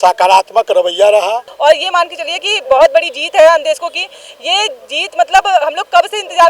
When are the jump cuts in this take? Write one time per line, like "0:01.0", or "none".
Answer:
0:01.5